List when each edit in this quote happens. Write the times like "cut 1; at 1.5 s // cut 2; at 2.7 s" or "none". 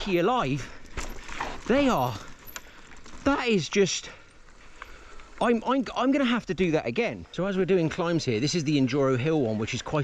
cut 1; at 7.2 s